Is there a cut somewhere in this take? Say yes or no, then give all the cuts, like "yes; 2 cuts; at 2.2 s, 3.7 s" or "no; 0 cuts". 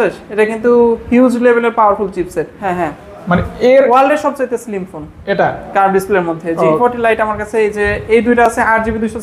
yes; 2 cuts; at 2.6 s, 6.8 s